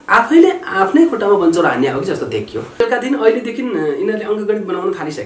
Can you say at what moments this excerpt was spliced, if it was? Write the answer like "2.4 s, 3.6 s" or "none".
2.8 s